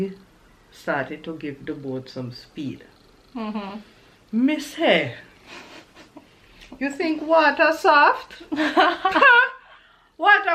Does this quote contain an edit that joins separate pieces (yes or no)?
no